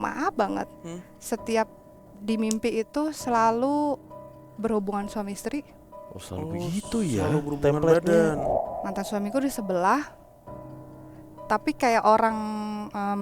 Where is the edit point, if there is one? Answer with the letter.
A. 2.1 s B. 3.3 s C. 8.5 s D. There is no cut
C